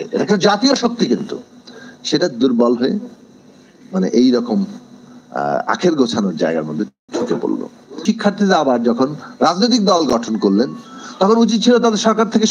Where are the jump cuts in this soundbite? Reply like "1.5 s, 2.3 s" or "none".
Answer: 8.0 s